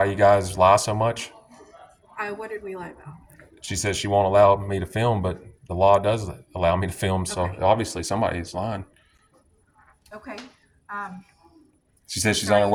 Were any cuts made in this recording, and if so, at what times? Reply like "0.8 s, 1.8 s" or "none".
none